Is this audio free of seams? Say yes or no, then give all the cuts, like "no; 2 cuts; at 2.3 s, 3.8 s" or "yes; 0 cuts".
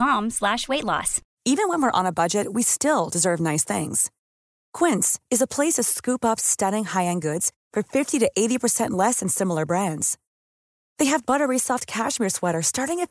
no; 1 cut; at 1.2 s